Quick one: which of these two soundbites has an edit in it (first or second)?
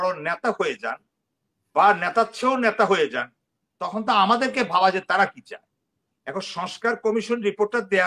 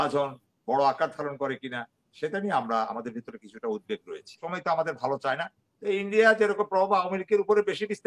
second